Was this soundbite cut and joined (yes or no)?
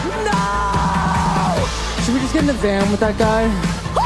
no